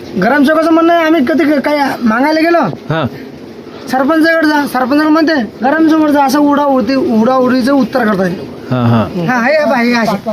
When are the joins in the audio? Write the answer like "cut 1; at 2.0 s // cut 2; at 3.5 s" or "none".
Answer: cut 1; at 9.2 s